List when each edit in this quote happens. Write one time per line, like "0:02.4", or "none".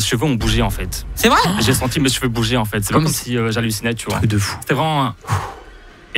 0:01.5
0:04.2